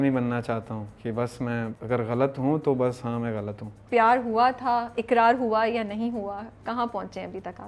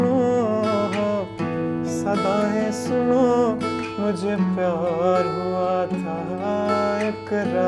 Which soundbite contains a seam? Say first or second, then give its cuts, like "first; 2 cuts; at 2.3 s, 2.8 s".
first; 2 cuts; at 1.8 s, 3.8 s